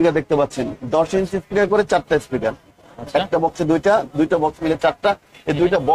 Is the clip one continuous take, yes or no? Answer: yes